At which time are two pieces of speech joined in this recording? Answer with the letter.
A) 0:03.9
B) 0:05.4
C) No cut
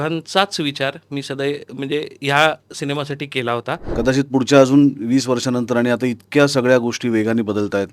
A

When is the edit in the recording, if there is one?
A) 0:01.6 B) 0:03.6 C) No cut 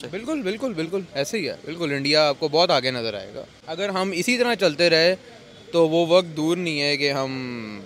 B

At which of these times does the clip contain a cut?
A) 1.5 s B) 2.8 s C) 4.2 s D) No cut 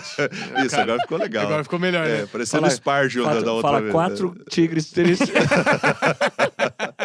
D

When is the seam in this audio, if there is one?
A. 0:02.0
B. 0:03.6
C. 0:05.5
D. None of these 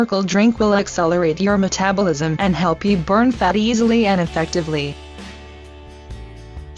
B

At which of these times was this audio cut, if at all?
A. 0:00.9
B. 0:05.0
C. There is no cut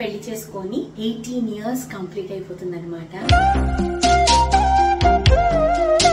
A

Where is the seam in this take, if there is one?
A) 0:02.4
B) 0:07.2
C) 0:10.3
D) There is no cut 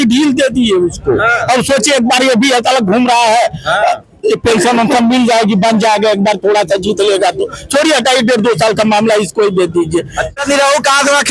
C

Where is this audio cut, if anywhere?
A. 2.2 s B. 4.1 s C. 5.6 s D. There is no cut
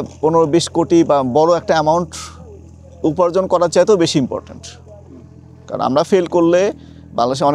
D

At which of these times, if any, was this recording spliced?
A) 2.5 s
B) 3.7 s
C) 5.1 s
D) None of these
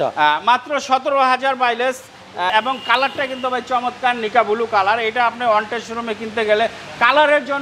A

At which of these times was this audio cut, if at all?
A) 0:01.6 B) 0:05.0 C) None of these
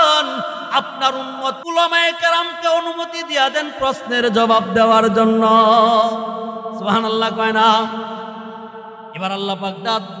A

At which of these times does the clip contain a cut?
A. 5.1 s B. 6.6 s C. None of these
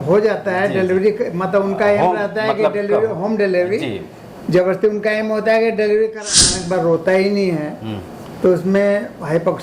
B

